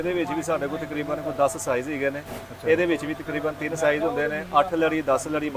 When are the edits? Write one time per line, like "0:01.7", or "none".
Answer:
none